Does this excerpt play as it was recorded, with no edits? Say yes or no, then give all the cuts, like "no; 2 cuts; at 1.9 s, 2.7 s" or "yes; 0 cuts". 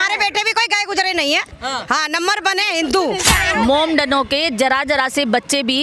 no; 1 cut; at 3.2 s